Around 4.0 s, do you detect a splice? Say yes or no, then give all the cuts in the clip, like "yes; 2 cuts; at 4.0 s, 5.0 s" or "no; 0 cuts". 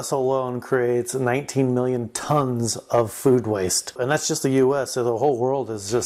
yes; 1 cut; at 4.0 s